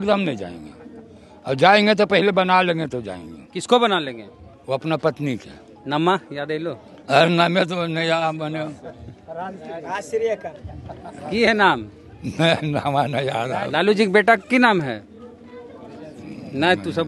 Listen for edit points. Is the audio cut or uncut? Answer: uncut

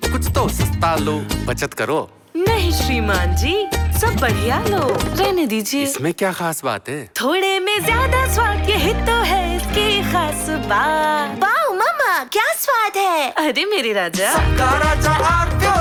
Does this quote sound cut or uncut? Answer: uncut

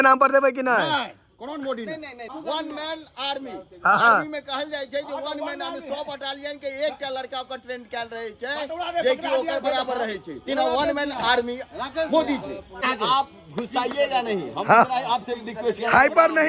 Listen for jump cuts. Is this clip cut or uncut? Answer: cut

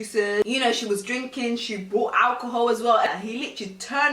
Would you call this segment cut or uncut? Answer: cut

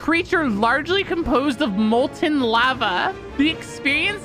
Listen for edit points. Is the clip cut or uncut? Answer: cut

